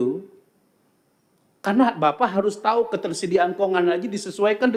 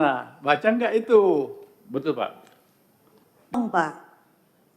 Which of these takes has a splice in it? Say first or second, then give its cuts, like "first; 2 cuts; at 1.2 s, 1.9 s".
second; 1 cut; at 3.6 s